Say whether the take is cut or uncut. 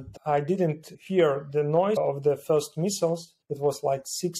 cut